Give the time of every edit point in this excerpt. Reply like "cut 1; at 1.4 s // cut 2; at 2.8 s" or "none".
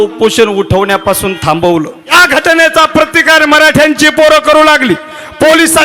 cut 1; at 2.1 s